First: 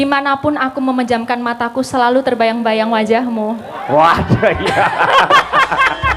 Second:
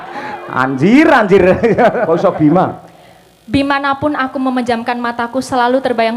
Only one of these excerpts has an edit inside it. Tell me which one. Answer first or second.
second